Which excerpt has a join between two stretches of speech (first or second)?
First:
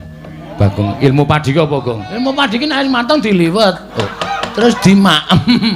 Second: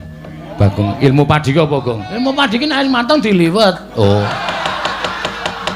first